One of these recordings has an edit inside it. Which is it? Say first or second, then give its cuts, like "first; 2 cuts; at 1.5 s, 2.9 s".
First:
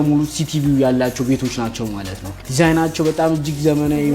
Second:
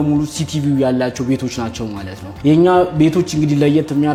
first; 1 cut; at 2.3 s